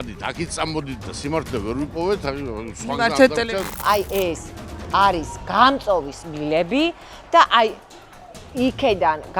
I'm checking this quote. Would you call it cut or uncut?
cut